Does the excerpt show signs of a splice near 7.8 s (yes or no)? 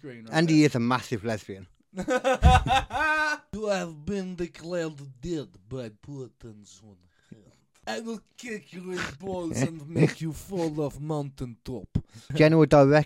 yes